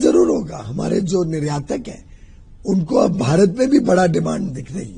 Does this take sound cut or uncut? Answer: uncut